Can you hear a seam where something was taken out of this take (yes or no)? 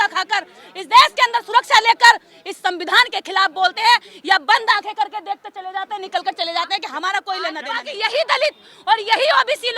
yes